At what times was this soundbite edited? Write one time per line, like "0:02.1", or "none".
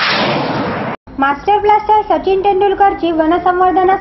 0:00.9